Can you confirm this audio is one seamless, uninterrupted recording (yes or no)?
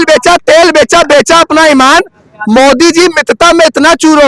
yes